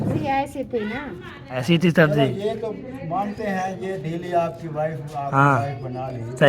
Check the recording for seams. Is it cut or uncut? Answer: cut